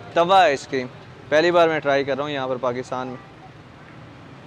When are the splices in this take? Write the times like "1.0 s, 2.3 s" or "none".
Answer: none